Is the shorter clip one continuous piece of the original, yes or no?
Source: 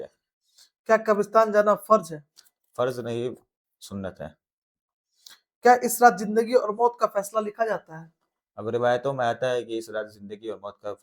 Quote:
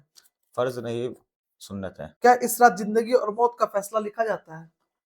no